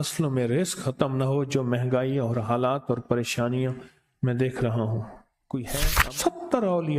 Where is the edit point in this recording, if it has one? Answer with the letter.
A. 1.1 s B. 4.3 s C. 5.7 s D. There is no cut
C